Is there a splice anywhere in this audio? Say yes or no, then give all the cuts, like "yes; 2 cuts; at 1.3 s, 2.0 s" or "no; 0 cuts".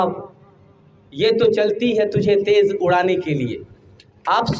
no; 0 cuts